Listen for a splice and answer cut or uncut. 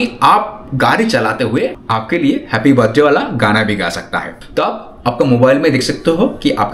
cut